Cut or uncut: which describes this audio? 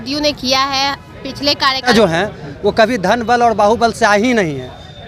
cut